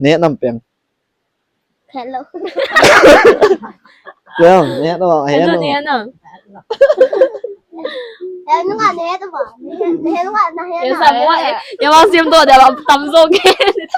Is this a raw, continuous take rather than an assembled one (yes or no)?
yes